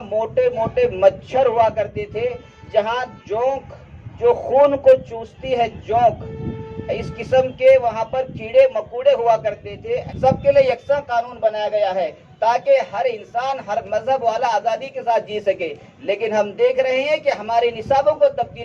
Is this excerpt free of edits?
no; 1 cut; at 10.1 s

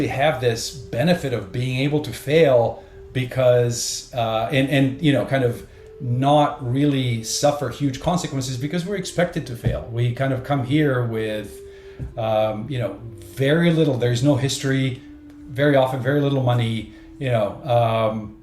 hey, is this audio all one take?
no; 1 cut; at 2.9 s

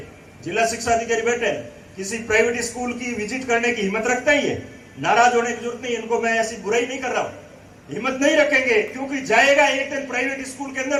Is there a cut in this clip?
no; 0 cuts

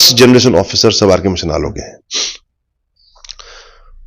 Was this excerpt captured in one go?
yes; 0 cuts

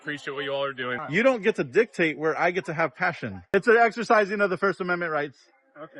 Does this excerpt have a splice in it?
yes; 2 cuts; at 1.0 s, 3.4 s

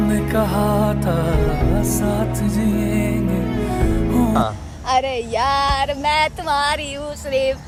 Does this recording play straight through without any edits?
yes; 0 cuts

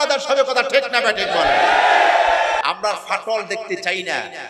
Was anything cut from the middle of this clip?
yes; 1 cut; at 2.6 s

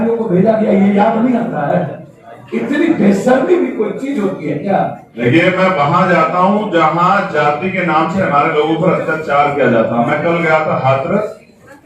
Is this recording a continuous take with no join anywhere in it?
no; 1 cut; at 5.2 s

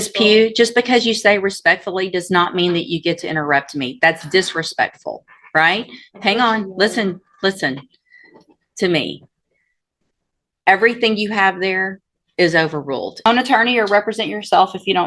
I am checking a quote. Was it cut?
yes; 1 cut; at 13.3 s

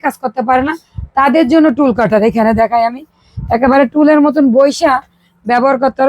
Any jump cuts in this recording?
no; 0 cuts

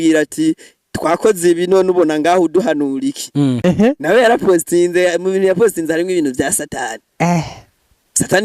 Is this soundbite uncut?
no; 1 cut; at 3.6 s

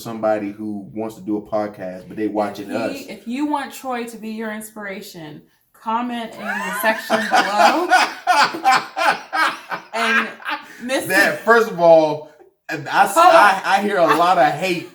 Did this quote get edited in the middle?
no; 0 cuts

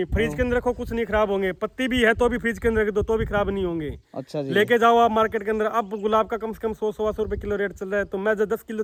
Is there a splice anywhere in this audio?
no; 0 cuts

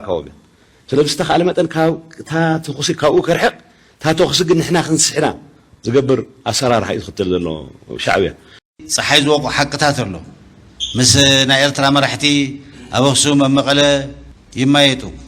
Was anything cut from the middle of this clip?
yes; 1 cut; at 8.5 s

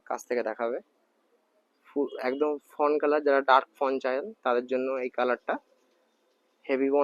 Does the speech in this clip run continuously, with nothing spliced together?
yes; 0 cuts

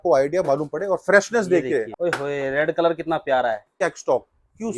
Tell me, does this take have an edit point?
yes; 2 cuts; at 1.9 s, 3.8 s

